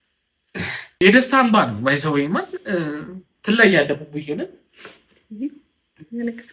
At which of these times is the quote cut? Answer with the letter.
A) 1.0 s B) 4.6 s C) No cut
A